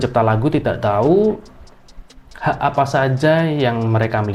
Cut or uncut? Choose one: uncut